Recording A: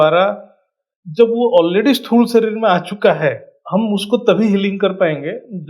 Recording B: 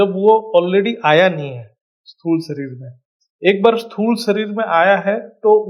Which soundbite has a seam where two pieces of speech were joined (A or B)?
A